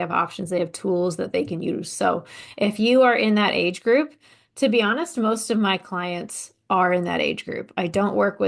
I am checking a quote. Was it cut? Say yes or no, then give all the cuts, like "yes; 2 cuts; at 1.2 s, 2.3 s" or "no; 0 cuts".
no; 0 cuts